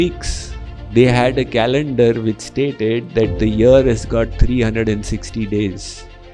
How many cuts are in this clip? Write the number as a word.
zero